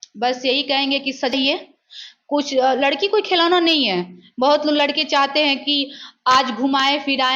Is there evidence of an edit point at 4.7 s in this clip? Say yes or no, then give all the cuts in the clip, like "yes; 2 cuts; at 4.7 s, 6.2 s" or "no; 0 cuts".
no; 1 cut; at 1.3 s